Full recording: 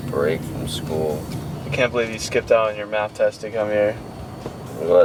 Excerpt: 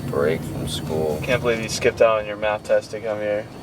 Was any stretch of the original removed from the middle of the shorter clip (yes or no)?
yes